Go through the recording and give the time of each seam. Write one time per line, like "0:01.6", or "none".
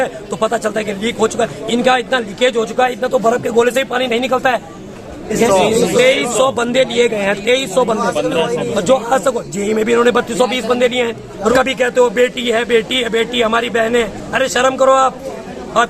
0:05.3
0:11.5